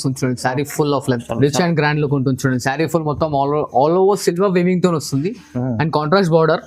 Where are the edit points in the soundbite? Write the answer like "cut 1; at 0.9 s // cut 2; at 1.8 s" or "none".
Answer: cut 1; at 1.3 s